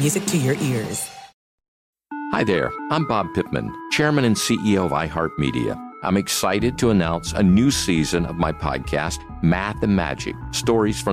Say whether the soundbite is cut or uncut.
cut